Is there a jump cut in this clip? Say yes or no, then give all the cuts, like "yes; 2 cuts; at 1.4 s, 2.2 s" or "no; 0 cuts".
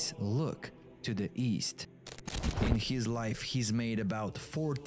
yes; 1 cut; at 2.3 s